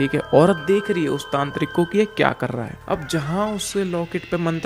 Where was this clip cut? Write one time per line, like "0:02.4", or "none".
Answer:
0:02.8